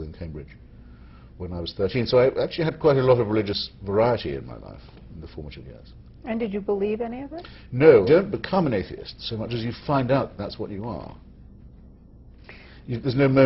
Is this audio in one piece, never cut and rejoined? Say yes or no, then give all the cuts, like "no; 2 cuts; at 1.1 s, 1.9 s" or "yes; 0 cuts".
no; 1 cut; at 8.1 s